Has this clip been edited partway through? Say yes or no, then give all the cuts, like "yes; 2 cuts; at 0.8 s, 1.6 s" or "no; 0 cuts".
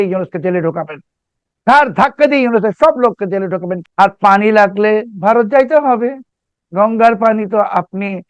yes; 1 cut; at 3.7 s